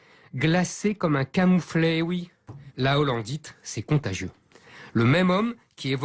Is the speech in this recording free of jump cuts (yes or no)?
yes